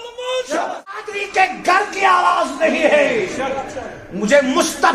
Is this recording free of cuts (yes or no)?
no